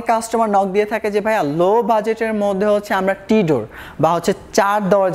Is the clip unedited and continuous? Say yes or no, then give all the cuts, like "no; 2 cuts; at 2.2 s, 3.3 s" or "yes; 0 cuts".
yes; 0 cuts